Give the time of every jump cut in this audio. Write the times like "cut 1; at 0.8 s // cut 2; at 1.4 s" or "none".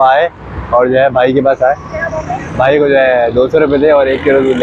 none